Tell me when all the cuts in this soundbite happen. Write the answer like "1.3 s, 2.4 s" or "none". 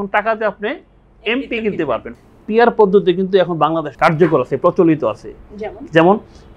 2.1 s, 3.9 s